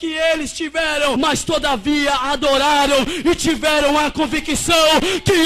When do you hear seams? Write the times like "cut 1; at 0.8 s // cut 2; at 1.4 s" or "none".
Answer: cut 1; at 1.2 s